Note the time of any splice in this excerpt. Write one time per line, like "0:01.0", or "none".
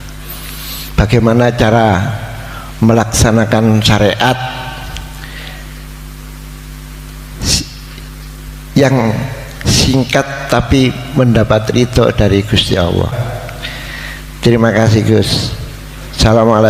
0:13.2